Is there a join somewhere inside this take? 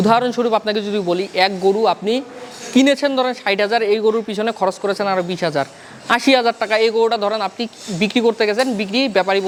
no; 0 cuts

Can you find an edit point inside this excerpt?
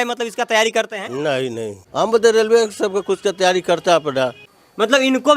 yes; 2 cuts; at 1.8 s, 4.4 s

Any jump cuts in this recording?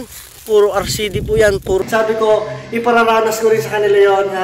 yes; 1 cut; at 1.8 s

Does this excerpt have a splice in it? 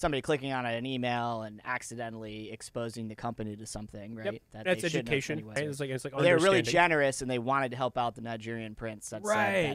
no; 0 cuts

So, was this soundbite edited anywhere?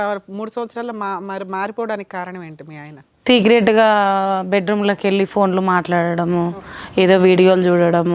no; 0 cuts

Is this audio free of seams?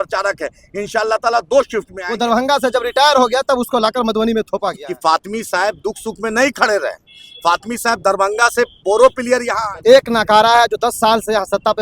no; 3 cuts; at 2.0 s, 4.9 s, 9.5 s

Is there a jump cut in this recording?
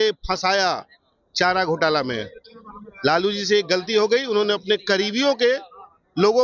no; 0 cuts

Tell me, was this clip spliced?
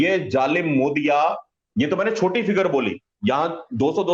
yes; 1 cut; at 1.5 s

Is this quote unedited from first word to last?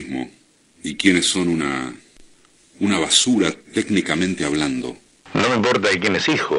no; 1 cut; at 5.2 s

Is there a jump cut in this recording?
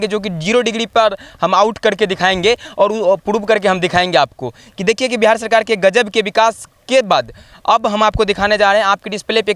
no; 0 cuts

